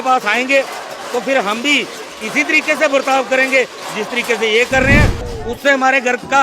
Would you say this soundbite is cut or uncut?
cut